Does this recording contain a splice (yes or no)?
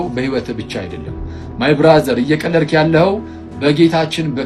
no